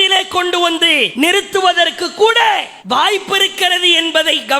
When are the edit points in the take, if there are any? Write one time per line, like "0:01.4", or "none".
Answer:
0:01.1
0:02.7